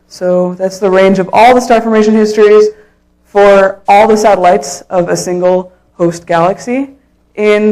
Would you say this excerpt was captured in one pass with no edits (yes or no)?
yes